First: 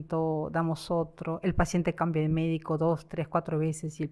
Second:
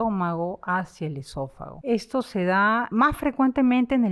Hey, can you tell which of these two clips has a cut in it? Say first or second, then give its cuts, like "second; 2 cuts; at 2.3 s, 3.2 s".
second; 2 cuts; at 1.7 s, 2.9 s